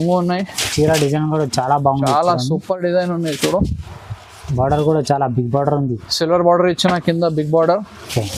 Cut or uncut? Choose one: uncut